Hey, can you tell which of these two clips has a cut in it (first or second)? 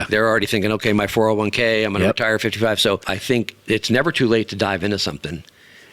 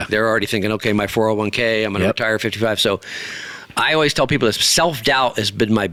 first